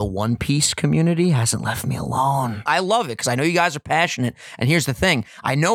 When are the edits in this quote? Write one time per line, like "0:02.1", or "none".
0:02.6